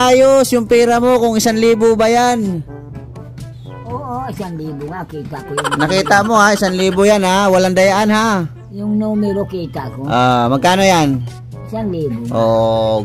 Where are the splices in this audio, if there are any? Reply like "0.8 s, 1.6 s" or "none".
none